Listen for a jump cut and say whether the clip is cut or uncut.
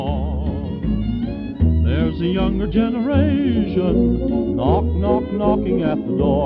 uncut